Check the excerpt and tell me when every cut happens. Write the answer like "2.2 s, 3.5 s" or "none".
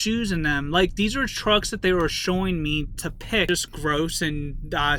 3.5 s

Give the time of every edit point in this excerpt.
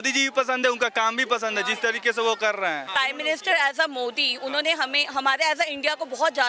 2.9 s

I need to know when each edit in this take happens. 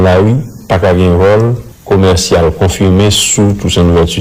1.7 s

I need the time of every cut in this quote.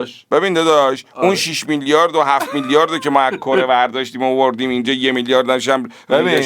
none

